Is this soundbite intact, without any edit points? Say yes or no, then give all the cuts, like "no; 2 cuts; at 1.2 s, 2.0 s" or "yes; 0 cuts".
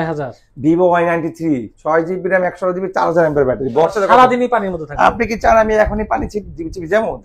no; 1 cut; at 3.9 s